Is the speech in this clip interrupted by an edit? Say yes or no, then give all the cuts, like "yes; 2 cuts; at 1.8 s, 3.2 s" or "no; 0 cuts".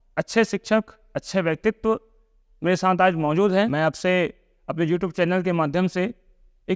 yes; 1 cut; at 3.7 s